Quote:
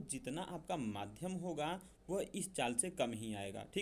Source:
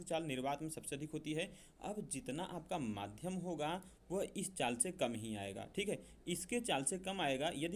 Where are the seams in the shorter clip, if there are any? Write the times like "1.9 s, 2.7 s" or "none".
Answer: none